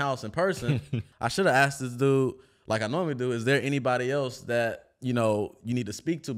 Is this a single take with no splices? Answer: no; 1 cut; at 1.1 s

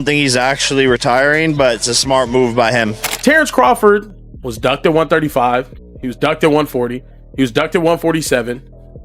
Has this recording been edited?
yes; 1 cut; at 3.0 s

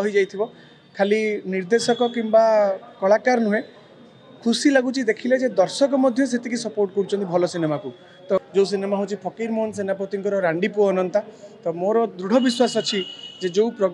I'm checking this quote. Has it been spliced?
yes; 1 cut; at 8.4 s

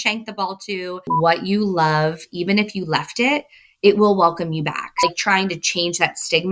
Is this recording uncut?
no; 2 cuts; at 0.9 s, 4.9 s

